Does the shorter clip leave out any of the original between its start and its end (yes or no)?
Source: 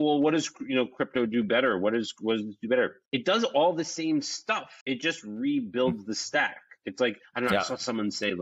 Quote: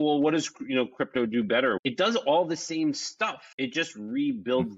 yes